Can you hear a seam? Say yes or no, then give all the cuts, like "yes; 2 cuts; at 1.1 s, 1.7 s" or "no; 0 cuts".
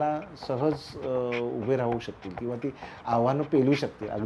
no; 0 cuts